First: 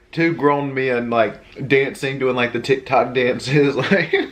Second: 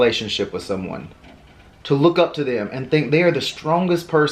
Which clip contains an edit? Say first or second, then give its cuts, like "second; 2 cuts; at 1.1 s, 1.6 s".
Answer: first; 1 cut; at 1.5 s